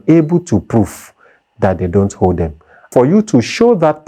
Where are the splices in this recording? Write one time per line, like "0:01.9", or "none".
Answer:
0:02.9